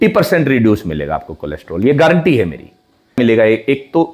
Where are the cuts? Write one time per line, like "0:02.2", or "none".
0:03.2

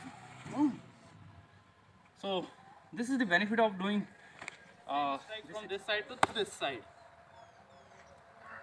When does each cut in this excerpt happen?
0:05.5

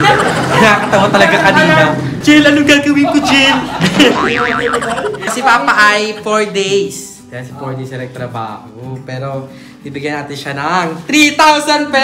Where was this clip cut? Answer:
0:02.1
0:05.2

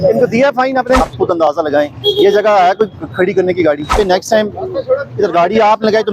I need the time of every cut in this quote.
0:01.1
0:03.9

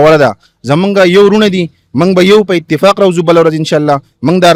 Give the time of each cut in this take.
none

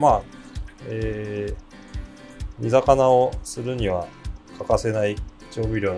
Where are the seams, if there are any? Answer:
none

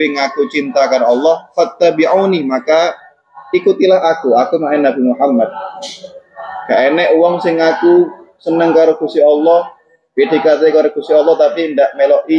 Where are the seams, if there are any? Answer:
none

